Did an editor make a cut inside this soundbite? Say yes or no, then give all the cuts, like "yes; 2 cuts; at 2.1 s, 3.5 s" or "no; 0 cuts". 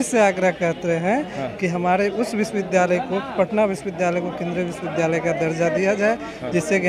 no; 0 cuts